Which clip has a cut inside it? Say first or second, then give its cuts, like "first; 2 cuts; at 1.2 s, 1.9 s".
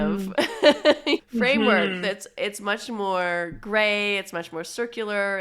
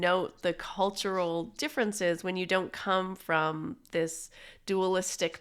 first; 1 cut; at 1.3 s